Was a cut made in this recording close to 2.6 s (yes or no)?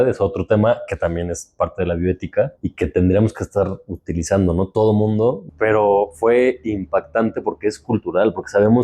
yes